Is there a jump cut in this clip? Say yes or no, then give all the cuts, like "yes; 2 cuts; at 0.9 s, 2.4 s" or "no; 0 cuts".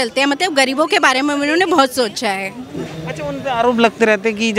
no; 0 cuts